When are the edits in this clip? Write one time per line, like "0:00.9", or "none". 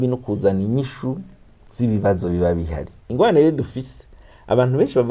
0:03.0